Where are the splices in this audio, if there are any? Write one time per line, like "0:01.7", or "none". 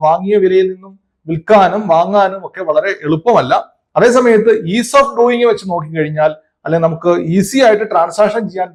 none

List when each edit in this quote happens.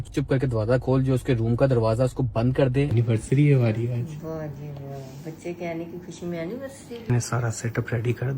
0:02.9
0:07.0

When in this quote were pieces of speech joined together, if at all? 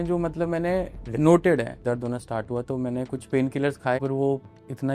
0:01.0
0:01.8
0:04.0

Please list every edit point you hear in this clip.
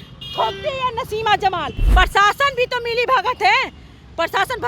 0:01.8

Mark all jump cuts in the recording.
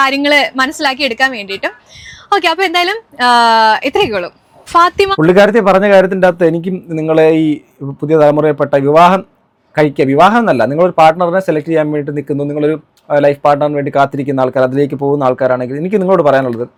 none

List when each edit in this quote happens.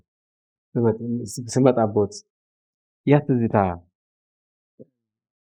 none

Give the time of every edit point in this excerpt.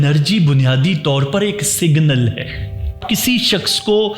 0:03.0

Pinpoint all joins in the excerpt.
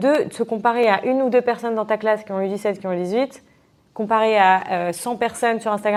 none

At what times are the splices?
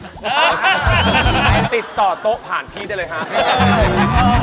0:01.7
0:03.3

